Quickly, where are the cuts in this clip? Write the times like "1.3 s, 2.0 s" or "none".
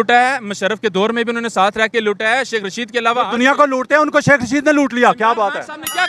none